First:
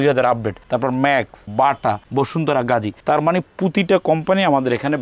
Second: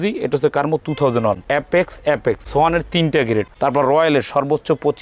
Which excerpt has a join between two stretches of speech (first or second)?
second